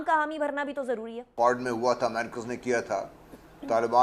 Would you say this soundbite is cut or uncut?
cut